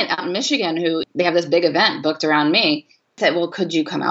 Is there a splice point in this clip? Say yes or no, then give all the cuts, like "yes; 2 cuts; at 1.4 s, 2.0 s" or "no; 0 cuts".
yes; 2 cuts; at 1.0 s, 3.2 s